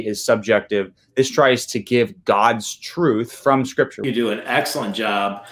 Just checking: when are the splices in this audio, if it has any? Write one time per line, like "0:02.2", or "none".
0:04.0